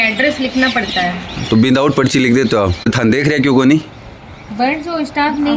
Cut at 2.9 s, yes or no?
yes